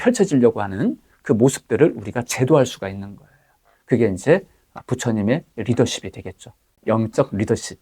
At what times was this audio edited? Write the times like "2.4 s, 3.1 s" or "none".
6.7 s